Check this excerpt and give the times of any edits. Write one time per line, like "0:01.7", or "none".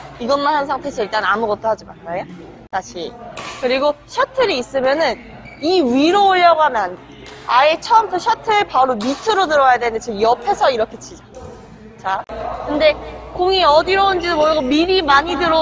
0:02.5
0:12.4